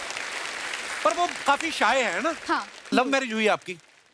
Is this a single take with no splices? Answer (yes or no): no